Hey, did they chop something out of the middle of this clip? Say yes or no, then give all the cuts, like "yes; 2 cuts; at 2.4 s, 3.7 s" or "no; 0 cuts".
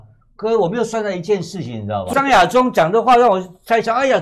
yes; 1 cut; at 2.1 s